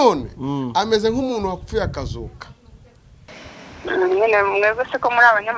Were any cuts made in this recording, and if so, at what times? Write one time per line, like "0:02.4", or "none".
0:03.3